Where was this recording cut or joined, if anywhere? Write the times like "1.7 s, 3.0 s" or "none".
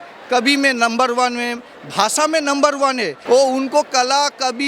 3.1 s